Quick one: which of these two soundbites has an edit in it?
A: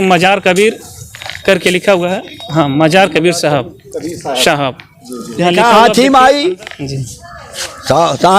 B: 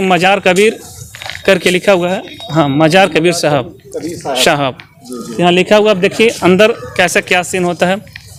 A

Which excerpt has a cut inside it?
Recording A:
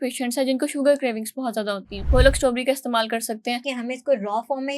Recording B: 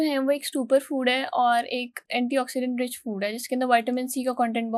A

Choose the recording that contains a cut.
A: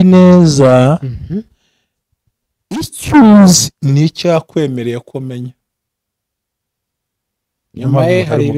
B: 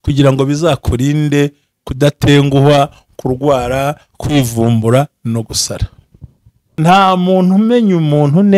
B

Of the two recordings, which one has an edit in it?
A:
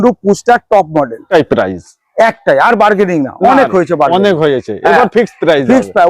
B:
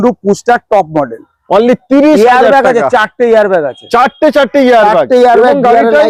A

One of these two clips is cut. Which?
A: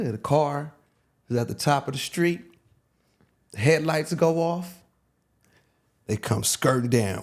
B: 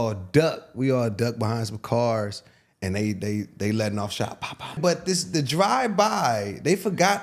B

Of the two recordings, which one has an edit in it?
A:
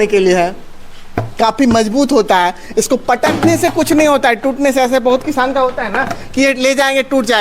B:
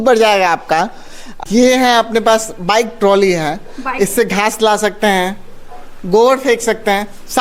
B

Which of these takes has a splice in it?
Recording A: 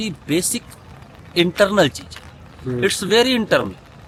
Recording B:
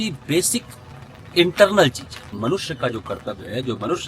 B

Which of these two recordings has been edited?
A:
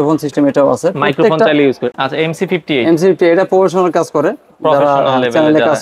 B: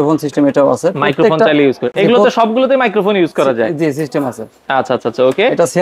A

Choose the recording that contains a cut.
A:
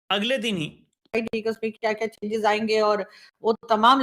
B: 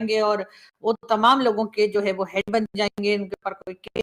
A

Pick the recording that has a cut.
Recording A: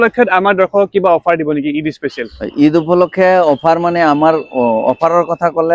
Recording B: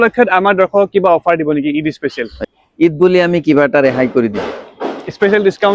B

